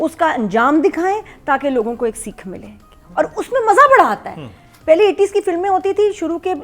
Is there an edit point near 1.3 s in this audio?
no; 0 cuts

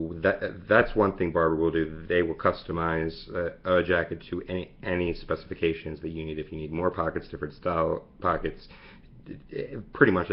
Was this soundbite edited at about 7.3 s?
yes; 1 cut; at 7.3 s

